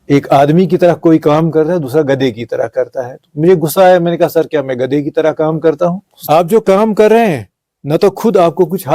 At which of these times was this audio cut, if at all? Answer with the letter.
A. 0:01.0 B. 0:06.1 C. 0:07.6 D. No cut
B